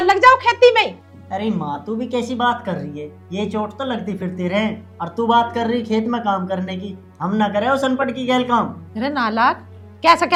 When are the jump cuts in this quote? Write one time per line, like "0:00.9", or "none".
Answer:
none